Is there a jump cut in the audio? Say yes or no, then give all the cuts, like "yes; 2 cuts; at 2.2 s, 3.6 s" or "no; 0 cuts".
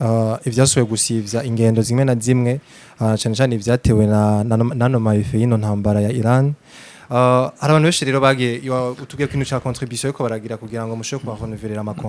no; 0 cuts